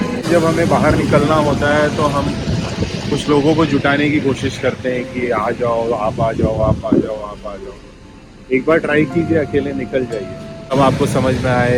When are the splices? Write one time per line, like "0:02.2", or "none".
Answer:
none